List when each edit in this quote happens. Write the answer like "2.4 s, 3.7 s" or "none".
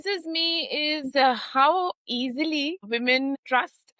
none